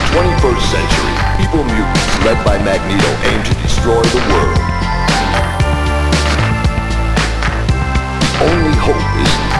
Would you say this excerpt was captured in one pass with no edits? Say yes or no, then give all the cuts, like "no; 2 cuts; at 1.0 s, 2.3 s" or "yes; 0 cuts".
yes; 0 cuts